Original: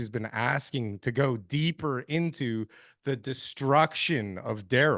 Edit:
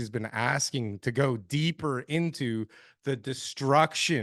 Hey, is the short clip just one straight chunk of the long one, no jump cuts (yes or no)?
yes